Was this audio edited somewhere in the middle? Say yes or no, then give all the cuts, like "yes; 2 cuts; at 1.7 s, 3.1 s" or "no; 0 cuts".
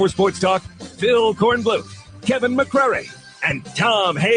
no; 0 cuts